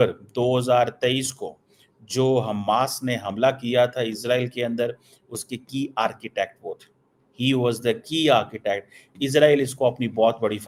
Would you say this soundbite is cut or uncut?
uncut